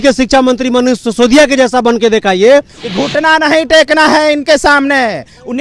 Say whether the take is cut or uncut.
cut